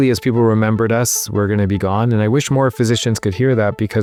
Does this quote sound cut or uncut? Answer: uncut